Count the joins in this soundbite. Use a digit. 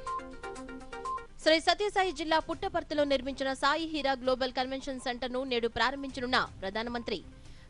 1